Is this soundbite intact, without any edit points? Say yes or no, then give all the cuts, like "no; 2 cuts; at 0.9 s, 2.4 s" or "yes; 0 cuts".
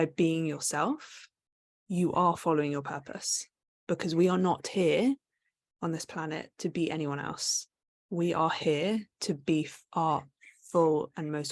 yes; 0 cuts